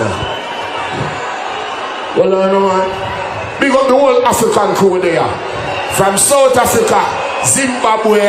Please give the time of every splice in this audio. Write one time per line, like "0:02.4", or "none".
none